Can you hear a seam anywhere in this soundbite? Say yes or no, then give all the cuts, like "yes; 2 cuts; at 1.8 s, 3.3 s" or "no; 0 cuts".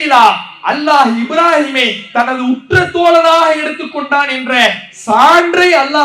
no; 0 cuts